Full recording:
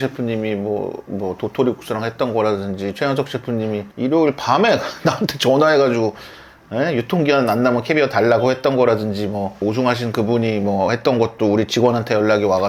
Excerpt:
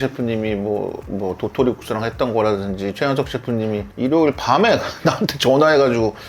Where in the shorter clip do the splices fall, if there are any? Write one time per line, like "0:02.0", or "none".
none